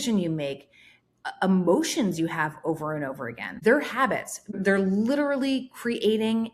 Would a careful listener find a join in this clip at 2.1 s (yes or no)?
no